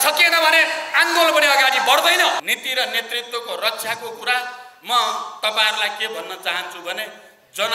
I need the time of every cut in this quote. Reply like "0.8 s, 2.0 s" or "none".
2.4 s